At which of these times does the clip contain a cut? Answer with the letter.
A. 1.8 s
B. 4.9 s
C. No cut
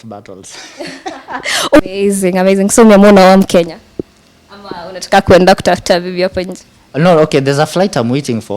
A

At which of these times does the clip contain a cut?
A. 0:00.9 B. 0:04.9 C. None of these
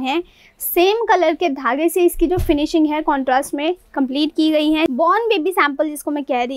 B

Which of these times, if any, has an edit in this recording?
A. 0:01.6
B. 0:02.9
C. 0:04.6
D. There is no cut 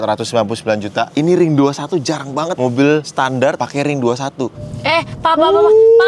C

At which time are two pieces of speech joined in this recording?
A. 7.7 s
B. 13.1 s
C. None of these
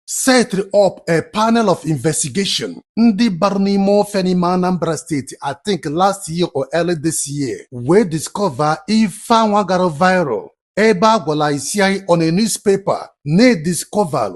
A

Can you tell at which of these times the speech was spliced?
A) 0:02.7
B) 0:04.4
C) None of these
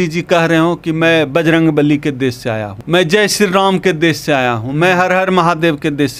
A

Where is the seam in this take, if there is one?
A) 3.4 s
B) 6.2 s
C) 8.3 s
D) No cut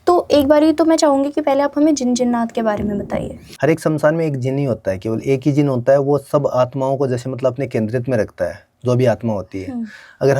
A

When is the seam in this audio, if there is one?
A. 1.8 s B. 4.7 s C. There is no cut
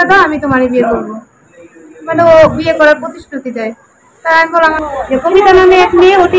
B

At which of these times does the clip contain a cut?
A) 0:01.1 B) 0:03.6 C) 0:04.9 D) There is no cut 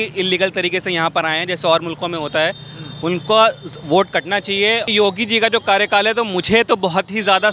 C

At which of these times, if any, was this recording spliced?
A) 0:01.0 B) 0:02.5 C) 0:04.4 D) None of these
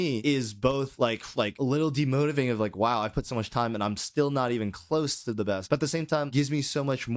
D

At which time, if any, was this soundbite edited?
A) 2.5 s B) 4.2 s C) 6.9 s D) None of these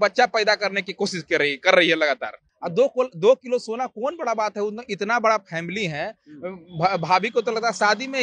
A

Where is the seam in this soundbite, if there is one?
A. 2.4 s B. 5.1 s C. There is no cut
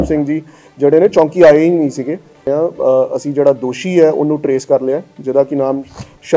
A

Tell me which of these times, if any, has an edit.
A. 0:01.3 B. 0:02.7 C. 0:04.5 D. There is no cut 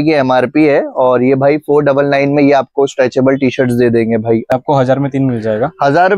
C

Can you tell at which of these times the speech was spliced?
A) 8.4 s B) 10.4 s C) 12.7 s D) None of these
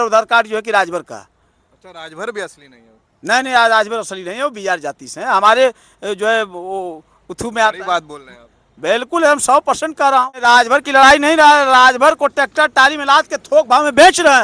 B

